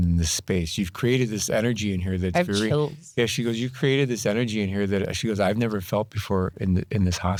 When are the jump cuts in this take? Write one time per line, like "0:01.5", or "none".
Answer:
none